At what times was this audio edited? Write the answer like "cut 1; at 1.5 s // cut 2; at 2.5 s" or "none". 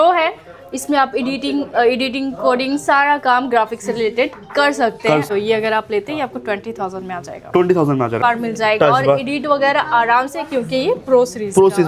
cut 1; at 5.3 s // cut 2; at 8.2 s